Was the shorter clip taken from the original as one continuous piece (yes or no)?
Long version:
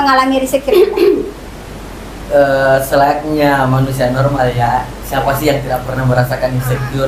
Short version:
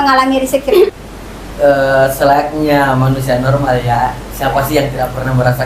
no